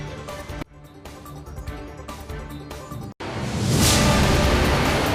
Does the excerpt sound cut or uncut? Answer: uncut